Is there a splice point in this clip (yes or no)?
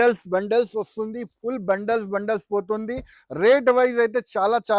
no